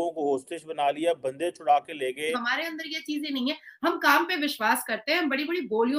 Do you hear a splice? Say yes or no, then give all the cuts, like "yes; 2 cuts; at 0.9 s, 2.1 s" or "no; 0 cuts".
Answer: yes; 1 cut; at 2.5 s